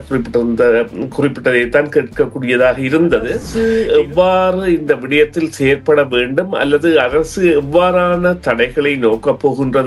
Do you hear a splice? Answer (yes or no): yes